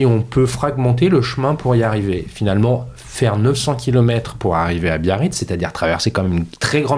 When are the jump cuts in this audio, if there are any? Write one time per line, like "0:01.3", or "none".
none